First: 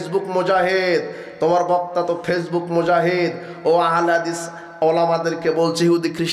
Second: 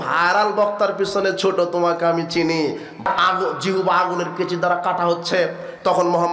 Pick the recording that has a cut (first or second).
second